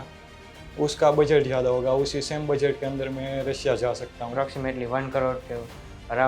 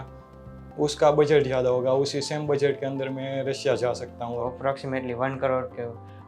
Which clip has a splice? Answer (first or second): first